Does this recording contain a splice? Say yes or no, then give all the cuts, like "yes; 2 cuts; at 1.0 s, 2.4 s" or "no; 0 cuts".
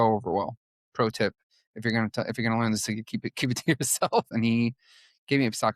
yes; 1 cut; at 4.3 s